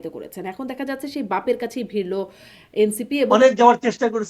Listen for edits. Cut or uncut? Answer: cut